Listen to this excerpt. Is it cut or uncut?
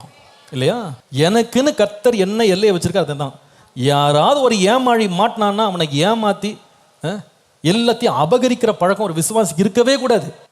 cut